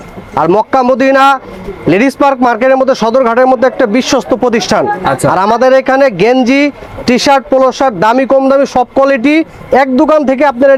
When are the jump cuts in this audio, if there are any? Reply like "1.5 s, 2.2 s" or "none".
none